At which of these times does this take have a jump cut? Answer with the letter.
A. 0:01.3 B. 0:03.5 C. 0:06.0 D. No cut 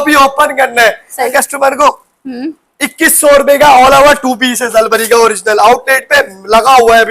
A